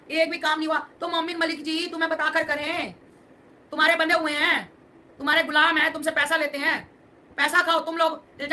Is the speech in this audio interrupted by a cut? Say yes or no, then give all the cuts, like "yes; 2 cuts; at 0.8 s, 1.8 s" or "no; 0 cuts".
no; 0 cuts